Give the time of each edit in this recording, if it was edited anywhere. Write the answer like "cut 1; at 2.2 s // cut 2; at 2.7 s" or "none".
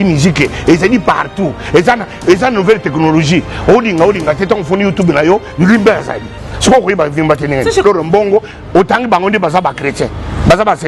cut 1; at 7.8 s